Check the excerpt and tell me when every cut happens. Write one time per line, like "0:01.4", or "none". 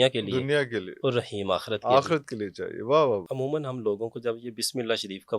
0:03.3